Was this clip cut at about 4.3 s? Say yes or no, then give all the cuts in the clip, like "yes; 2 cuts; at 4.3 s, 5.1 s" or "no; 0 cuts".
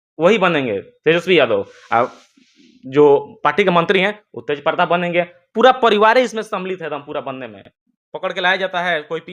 no; 1 cut; at 7.6 s